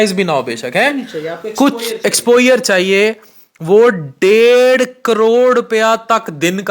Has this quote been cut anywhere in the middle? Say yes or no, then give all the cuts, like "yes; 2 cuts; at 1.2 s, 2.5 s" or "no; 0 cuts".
no; 0 cuts